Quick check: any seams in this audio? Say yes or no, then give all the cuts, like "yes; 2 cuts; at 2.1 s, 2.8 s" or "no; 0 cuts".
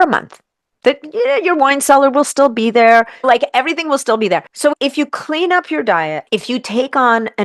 yes; 3 cuts; at 3.1 s, 4.5 s, 6.2 s